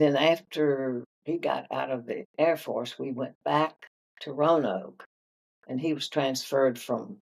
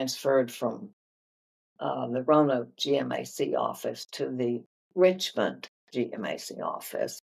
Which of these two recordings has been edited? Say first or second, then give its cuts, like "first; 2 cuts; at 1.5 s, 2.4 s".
first; 2 cuts; at 1.1 s, 2.3 s